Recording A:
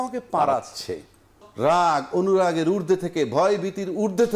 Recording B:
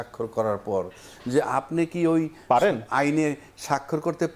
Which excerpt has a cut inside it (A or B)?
A